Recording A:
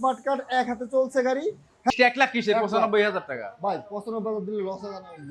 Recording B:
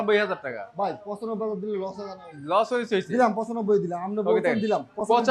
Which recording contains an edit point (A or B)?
A